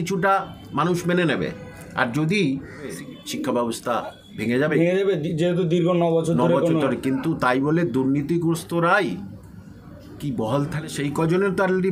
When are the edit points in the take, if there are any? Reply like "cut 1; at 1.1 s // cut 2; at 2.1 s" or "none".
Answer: cut 1; at 3.0 s // cut 2; at 10.9 s